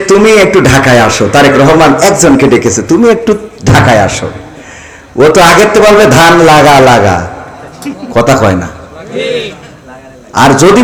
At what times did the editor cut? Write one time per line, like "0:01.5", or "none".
none